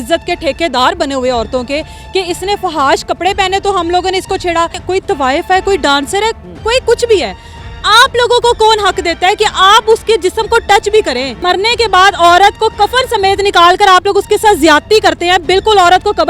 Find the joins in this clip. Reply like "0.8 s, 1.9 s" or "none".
4.8 s, 11.3 s